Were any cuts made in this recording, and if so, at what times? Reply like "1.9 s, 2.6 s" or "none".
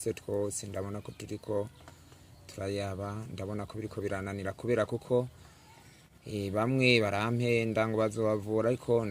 none